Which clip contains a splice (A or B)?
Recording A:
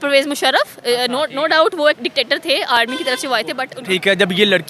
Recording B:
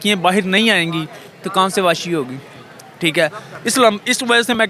A